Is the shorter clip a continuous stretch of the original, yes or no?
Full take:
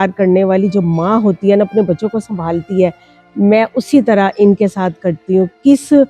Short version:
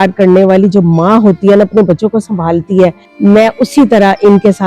no